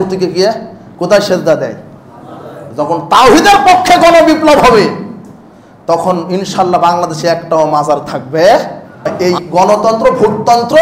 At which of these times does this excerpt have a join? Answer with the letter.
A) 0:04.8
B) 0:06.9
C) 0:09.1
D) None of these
C